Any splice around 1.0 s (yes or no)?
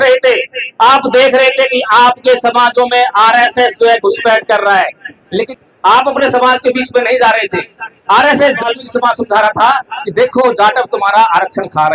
no